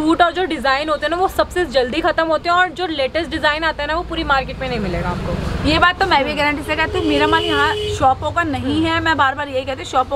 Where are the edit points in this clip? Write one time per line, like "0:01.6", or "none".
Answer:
none